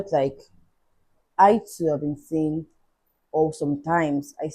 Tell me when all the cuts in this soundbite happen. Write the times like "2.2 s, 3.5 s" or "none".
none